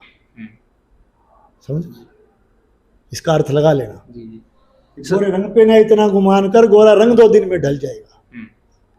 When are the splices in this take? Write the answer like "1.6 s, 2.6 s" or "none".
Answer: none

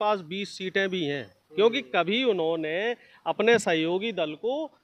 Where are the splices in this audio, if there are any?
none

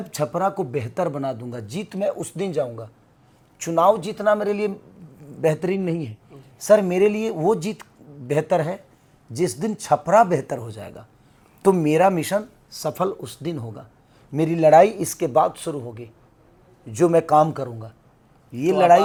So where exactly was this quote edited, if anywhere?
none

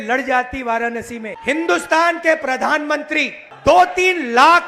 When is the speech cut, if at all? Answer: 1.3 s

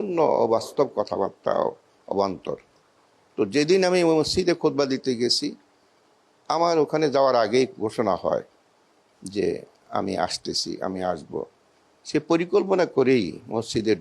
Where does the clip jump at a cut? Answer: none

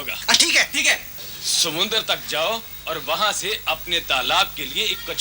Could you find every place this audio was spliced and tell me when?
1.2 s

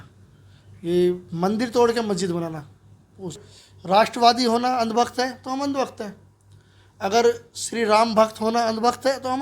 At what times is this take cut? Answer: 3.5 s

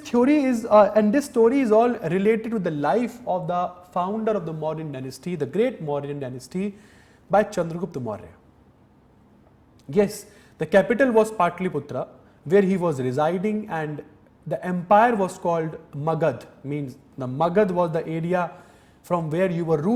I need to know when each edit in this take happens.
none

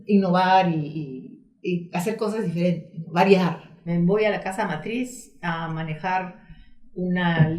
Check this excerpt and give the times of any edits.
3.9 s

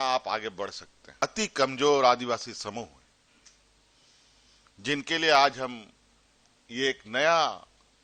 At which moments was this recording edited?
1.2 s

